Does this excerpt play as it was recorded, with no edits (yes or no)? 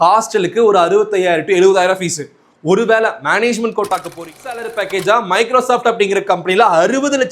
no